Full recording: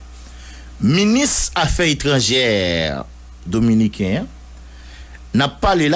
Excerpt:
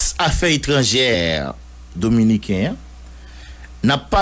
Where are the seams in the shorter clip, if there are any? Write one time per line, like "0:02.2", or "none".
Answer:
0:01.1